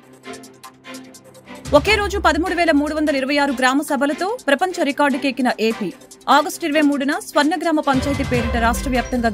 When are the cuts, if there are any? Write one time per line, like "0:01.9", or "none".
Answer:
none